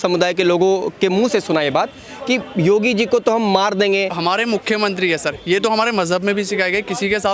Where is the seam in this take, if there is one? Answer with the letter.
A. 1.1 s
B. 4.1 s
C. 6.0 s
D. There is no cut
B